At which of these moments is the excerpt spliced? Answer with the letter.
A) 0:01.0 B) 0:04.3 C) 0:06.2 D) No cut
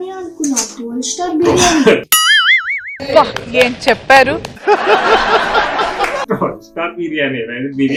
D